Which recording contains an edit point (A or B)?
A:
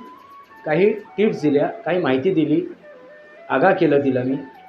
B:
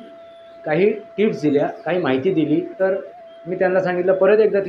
B